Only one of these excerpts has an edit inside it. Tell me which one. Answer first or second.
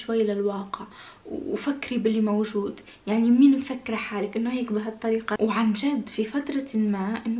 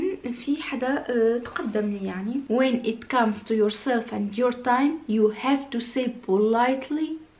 second